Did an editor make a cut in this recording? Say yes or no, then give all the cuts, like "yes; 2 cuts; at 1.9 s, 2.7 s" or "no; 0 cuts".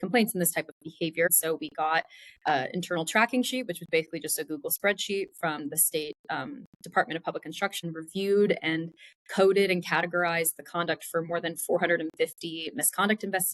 yes; 2 cuts; at 1.3 s, 7.8 s